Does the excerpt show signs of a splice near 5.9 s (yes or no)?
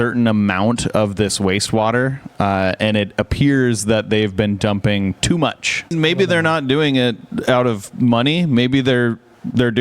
yes